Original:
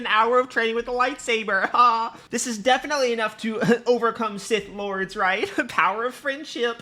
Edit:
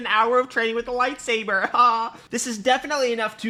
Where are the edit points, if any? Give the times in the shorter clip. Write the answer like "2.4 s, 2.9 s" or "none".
none